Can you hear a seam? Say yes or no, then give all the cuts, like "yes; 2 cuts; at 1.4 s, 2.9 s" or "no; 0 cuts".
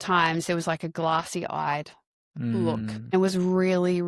yes; 1 cut; at 3.1 s